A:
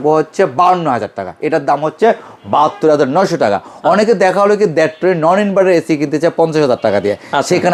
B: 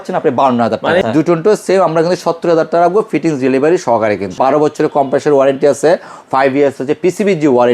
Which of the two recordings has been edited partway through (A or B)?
B